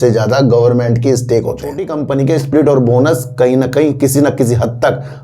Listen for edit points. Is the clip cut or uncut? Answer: cut